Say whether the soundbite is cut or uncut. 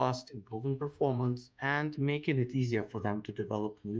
cut